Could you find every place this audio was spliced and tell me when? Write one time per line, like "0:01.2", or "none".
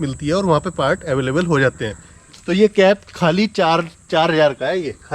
0:02.1